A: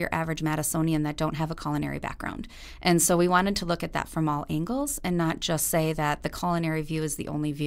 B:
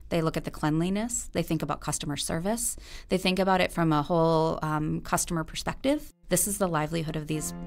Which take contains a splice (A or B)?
B